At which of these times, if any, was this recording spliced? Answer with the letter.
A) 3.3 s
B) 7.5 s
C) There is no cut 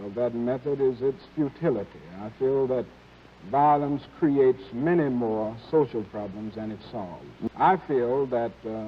B